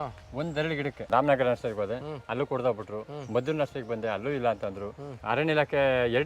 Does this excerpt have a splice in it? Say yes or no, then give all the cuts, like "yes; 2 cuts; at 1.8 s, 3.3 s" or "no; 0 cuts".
yes; 2 cuts; at 1.1 s, 5.1 s